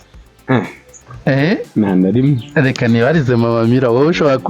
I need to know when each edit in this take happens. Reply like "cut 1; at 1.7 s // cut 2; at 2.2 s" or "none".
cut 1; at 1.0 s